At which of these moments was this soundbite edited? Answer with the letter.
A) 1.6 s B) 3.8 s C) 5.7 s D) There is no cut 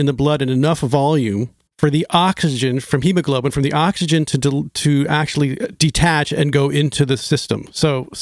A